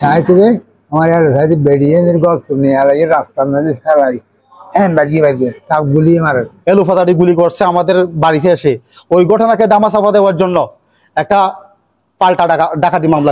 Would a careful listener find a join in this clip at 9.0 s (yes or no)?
no